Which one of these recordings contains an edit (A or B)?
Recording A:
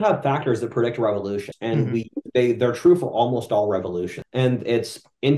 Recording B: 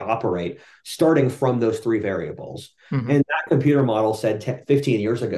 A